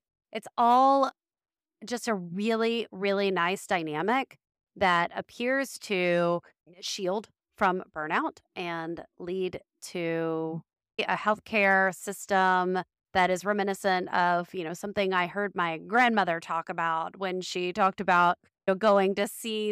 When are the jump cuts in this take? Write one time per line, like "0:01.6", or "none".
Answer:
none